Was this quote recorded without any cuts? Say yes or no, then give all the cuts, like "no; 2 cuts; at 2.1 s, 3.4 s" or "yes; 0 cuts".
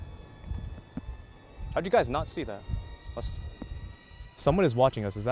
no; 1 cut; at 3.8 s